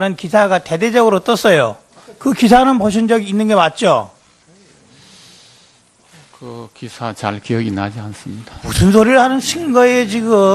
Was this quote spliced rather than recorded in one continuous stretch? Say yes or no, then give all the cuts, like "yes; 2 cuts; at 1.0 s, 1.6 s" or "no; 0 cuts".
no; 0 cuts